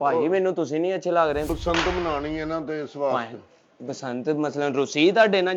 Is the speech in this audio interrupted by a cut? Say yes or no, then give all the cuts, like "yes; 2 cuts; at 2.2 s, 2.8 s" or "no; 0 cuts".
yes; 1 cut; at 1.5 s